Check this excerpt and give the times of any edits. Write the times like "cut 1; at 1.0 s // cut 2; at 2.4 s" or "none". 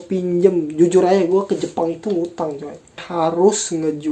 cut 1; at 3.1 s